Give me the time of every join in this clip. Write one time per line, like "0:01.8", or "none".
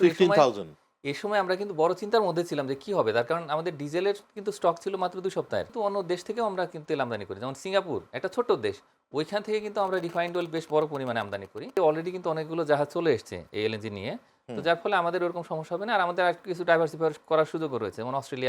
0:05.7
0:11.7